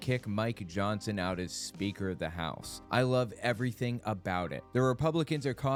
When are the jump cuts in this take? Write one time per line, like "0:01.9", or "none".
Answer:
none